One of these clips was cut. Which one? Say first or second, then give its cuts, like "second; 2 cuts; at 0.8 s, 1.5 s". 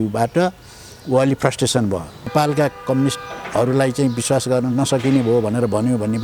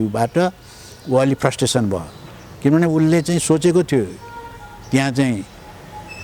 first; 1 cut; at 2.3 s